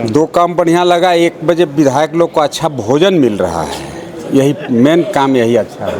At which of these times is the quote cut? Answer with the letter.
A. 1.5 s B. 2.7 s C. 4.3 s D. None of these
D